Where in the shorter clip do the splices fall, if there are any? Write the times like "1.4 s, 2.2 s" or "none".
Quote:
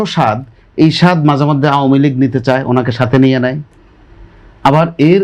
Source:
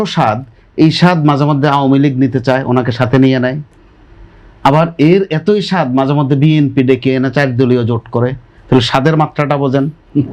none